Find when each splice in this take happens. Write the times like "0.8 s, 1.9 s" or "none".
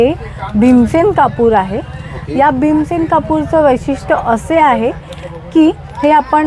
none